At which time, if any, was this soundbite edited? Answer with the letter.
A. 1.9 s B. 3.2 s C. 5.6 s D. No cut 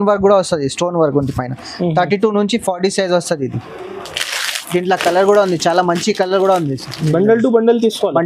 D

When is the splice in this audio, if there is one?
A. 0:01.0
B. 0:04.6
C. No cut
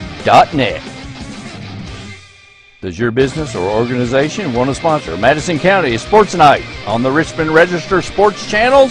C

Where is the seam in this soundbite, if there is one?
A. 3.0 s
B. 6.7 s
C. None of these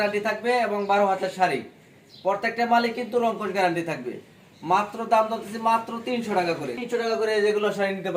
B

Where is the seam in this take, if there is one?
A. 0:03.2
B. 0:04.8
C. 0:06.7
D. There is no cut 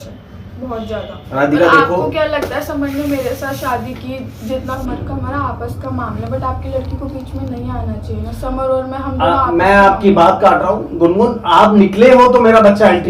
B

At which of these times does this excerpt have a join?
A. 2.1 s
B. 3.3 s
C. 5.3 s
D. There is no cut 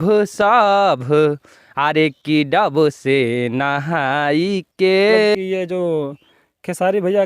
C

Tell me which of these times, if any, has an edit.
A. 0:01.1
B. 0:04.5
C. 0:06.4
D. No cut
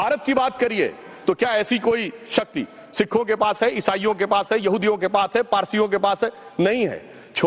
C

